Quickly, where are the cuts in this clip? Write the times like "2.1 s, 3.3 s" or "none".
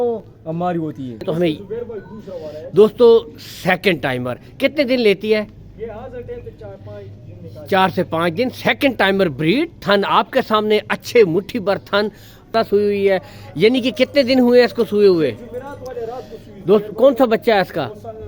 1.2 s, 12.5 s